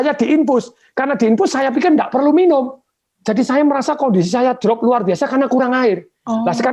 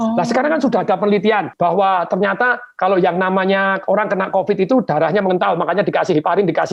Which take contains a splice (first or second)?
second